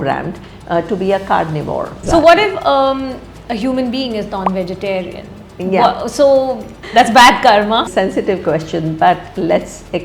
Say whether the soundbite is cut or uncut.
cut